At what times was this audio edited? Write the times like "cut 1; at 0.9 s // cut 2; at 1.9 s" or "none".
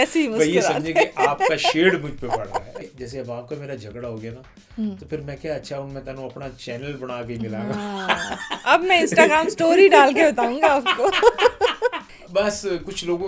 cut 1; at 2.8 s // cut 2; at 12.1 s